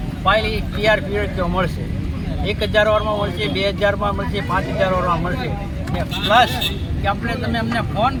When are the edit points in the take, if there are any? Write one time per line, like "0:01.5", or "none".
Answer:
none